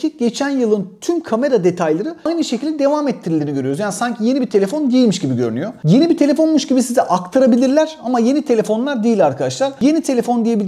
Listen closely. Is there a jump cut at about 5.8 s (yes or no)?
no